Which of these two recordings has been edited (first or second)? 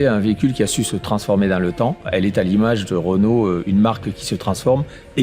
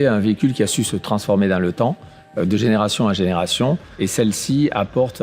first